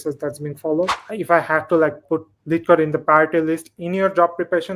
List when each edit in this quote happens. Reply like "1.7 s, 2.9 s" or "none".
1.1 s, 2.0 s